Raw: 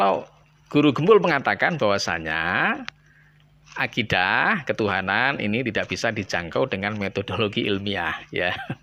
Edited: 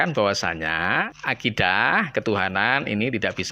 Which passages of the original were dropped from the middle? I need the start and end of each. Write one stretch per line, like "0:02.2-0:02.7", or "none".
0:02.8-0:03.7